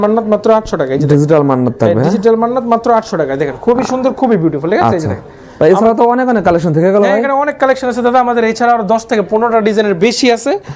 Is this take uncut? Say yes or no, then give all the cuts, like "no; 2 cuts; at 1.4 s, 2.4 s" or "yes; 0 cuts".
yes; 0 cuts